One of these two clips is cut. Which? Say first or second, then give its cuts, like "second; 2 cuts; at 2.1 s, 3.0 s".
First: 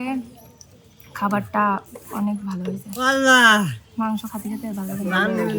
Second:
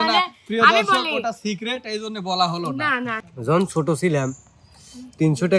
second; 1 cut; at 3.2 s